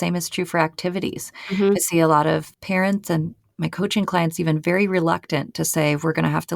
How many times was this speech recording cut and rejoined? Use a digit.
1